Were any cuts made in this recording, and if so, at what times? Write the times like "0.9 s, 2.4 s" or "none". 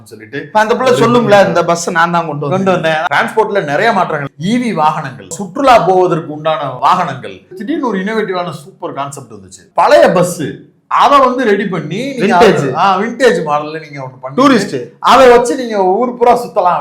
3.0 s, 4.3 s, 5.4 s, 6.8 s, 7.6 s, 9.6 s